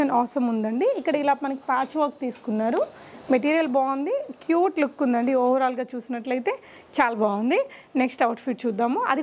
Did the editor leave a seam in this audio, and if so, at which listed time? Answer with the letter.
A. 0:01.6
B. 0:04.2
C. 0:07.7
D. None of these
D